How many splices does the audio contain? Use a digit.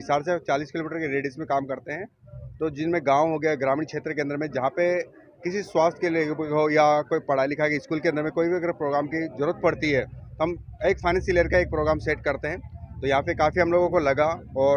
0